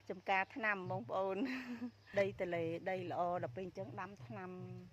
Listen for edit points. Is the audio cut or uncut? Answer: cut